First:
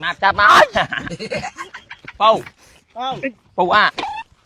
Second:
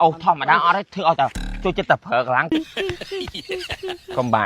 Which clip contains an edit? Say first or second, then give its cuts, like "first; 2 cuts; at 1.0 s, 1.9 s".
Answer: second; 1 cut; at 2.5 s